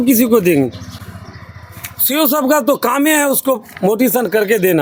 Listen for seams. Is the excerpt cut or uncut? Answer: uncut